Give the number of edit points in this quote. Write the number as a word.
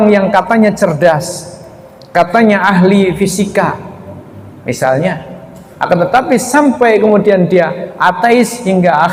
zero